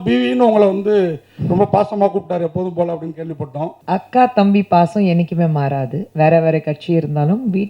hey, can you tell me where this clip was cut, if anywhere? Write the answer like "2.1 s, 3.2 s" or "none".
3.8 s